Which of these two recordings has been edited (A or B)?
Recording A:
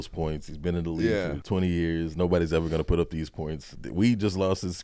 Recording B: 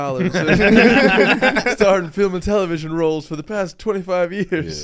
A